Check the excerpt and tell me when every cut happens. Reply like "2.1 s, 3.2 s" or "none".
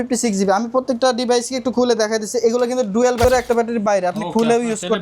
3.2 s